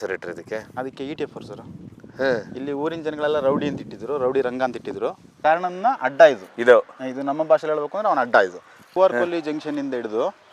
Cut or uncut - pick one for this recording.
cut